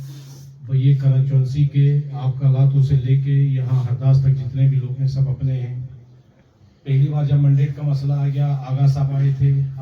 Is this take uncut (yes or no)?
no